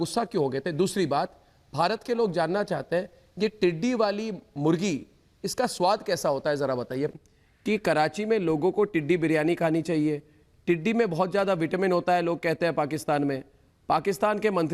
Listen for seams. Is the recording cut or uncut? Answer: cut